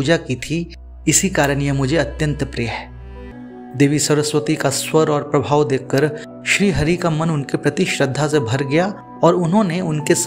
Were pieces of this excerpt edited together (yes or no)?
yes